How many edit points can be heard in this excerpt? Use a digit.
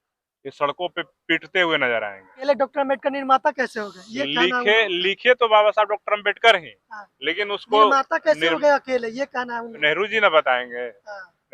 2